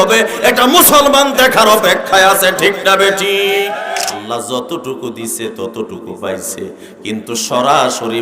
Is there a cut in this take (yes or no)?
yes